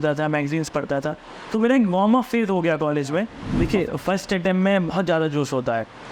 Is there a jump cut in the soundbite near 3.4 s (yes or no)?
yes